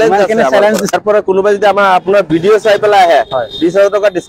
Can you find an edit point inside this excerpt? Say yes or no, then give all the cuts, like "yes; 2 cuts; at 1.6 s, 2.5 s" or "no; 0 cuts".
yes; 1 cut; at 0.9 s